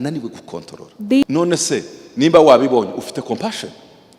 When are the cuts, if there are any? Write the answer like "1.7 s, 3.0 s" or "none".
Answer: 1.2 s